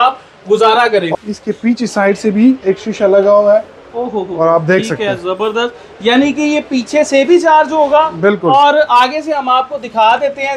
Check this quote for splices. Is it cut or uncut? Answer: cut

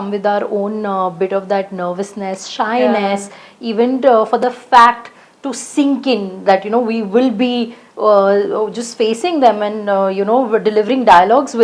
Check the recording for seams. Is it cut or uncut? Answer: uncut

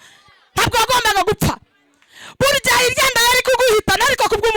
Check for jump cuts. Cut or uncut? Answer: uncut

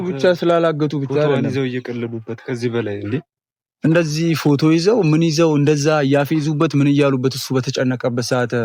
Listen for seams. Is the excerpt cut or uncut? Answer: uncut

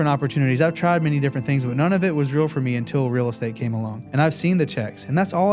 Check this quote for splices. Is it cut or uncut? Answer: uncut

